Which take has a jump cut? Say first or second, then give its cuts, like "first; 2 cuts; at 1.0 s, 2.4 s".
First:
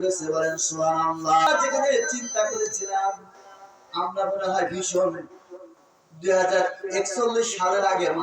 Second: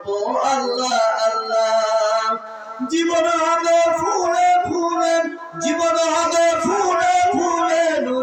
first; 1 cut; at 1.5 s